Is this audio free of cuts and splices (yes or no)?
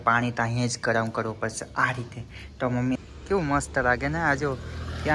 no